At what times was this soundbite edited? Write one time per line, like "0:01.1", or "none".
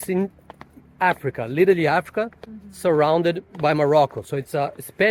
none